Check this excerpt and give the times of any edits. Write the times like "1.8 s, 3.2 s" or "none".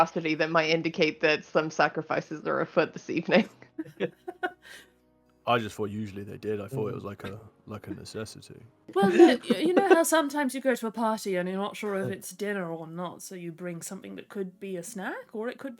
8.9 s